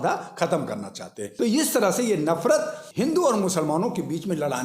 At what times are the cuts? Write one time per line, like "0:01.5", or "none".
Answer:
0:01.2
0:02.8